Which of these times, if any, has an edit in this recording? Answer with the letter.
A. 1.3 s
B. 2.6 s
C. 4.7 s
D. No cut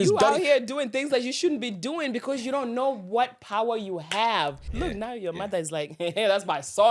C